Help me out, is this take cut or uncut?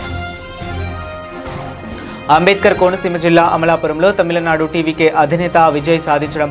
cut